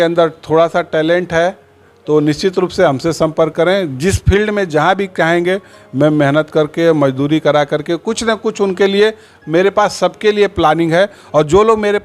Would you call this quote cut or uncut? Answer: uncut